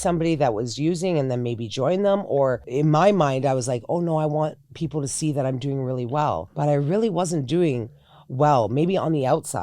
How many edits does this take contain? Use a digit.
2